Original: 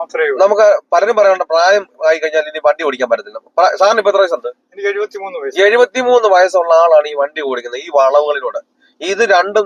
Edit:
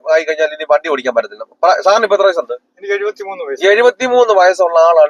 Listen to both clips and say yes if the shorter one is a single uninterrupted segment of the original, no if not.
yes